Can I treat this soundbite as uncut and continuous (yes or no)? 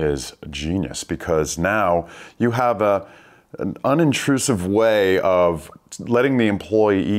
yes